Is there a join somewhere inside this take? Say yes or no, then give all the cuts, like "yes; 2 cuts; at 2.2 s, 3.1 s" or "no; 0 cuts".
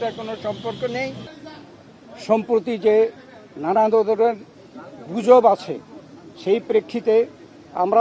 yes; 1 cut; at 1.3 s